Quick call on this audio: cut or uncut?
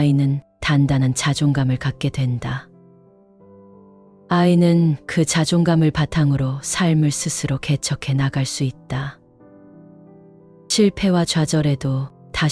cut